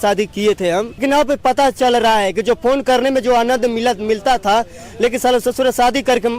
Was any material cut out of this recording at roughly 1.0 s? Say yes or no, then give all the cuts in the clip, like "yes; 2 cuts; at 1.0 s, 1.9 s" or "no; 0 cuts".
yes; 1 cut; at 1.0 s